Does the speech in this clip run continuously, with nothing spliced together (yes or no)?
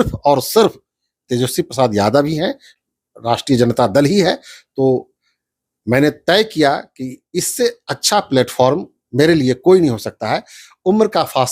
yes